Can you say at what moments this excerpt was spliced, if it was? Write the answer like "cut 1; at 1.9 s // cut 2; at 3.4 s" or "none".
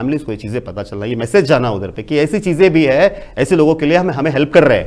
none

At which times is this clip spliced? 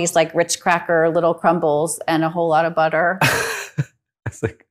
none

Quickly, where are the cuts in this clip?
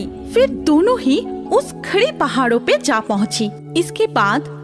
cut 1; at 3.6 s

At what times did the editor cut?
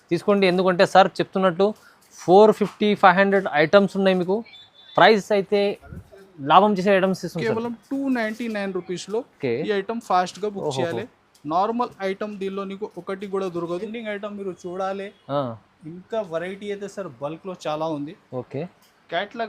cut 1; at 13.9 s

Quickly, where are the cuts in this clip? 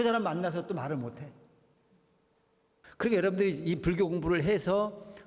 cut 1; at 2.8 s

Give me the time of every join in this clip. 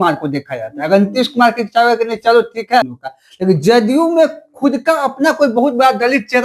cut 1; at 3.0 s

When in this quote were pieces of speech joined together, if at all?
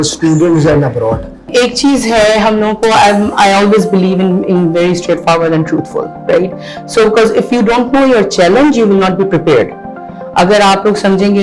cut 1; at 1.5 s

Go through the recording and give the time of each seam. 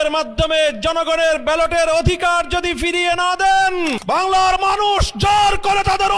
cut 1; at 4.0 s

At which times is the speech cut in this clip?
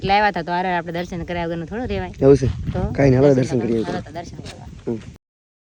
none

